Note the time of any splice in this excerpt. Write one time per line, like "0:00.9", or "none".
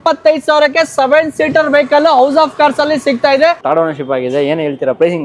0:03.6